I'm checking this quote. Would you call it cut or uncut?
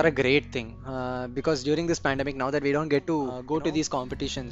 cut